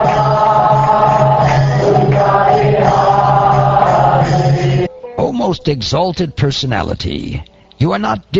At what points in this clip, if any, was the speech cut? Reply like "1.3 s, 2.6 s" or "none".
none